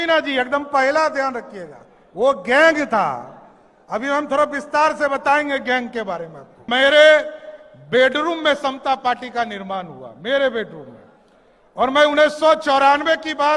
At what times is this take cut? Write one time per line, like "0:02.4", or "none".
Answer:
0:06.6